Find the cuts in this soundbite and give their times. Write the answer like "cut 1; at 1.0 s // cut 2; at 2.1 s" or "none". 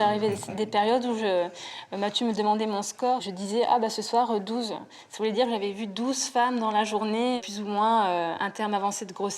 cut 1; at 3.3 s